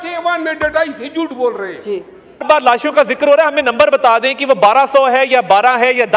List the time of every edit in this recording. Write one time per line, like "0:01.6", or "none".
0:02.4